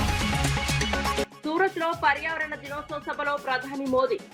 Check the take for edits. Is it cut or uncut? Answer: cut